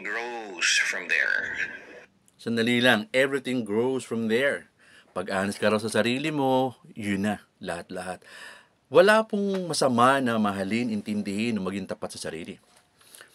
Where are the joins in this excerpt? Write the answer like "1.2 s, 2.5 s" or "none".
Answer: none